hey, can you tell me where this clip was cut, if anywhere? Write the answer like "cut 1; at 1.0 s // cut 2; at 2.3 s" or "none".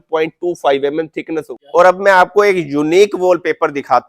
cut 1; at 1.5 s